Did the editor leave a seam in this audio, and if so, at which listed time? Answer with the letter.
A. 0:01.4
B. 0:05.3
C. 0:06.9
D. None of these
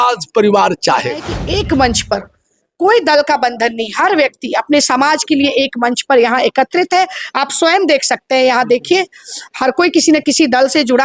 A